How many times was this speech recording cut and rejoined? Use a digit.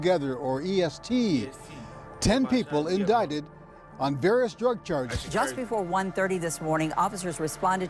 1